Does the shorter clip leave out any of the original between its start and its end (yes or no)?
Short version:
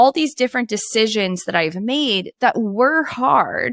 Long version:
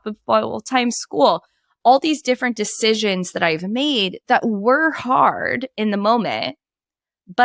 no